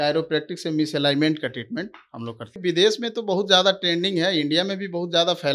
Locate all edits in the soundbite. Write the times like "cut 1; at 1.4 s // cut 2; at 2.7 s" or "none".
cut 1; at 2.6 s